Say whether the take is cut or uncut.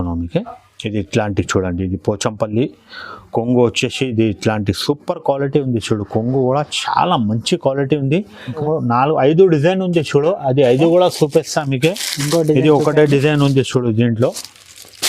cut